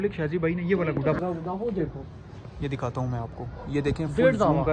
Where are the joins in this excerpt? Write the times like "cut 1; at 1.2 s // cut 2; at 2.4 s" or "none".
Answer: cut 1; at 1.2 s